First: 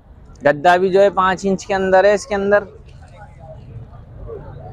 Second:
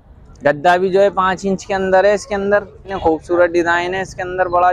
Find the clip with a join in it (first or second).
second